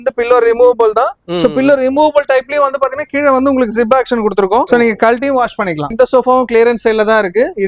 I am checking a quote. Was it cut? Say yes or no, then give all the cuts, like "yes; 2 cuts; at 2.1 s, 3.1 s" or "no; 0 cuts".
yes; 2 cuts; at 4.7 s, 5.9 s